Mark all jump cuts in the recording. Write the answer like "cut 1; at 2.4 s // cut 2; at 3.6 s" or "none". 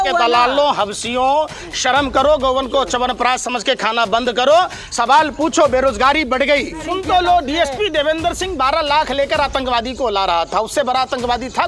cut 1; at 6.8 s